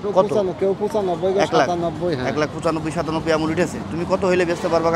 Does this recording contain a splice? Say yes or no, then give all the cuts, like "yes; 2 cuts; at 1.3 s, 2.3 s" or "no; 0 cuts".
no; 0 cuts